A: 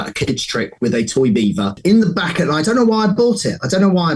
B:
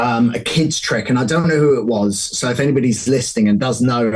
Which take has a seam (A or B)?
A